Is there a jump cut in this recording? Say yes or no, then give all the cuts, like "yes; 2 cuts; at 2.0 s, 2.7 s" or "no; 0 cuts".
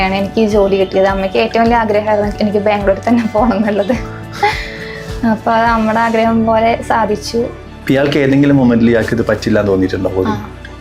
no; 0 cuts